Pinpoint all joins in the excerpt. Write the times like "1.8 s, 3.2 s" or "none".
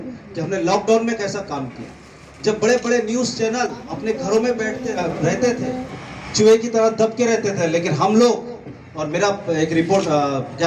3.9 s, 5.0 s

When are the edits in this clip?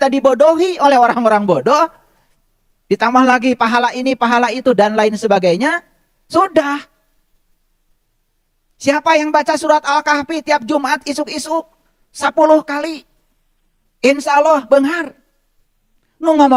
none

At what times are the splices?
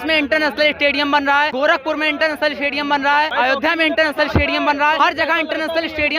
1.5 s, 3.3 s, 5.0 s

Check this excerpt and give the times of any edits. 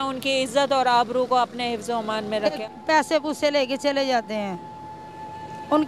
2.6 s

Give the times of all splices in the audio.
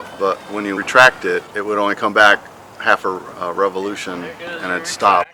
none

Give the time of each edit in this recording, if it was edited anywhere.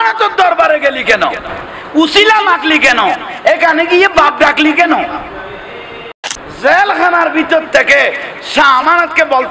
6.3 s

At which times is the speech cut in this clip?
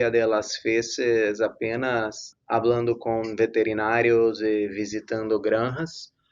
2.3 s

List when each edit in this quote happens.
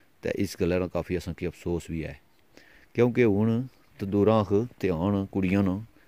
none

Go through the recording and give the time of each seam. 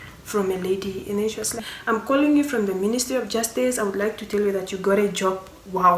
1.7 s

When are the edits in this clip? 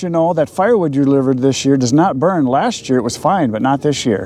none

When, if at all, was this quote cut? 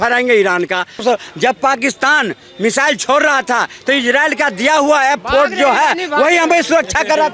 1.0 s

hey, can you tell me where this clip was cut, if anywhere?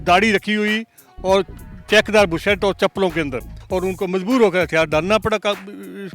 3.6 s

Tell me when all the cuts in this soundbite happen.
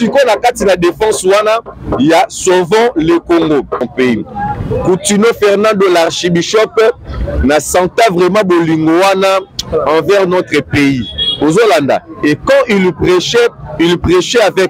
3.8 s

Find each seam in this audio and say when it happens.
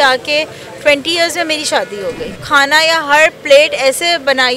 2.3 s

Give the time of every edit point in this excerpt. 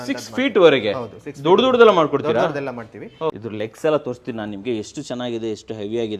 3.4 s

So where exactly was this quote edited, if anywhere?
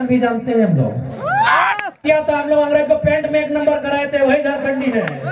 2.0 s

